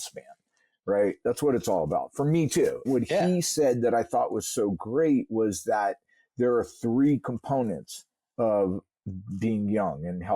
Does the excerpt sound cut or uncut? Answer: cut